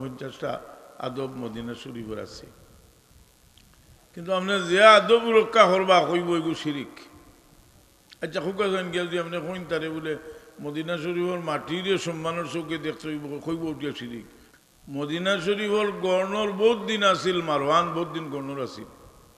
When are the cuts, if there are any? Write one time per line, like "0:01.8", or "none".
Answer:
0:14.4

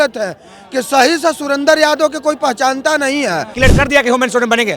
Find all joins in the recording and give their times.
0:03.5

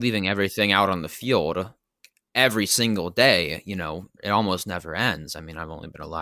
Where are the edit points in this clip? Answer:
0:01.9
0:03.6

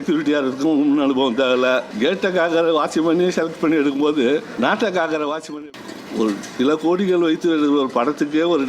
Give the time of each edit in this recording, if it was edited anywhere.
0:01.9
0:04.5
0:05.6

